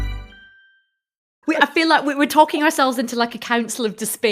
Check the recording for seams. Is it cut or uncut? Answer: cut